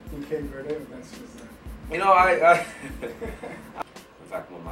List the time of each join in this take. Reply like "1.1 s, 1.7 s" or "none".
3.8 s